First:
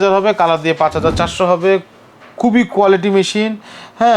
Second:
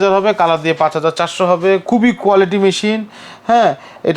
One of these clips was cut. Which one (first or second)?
second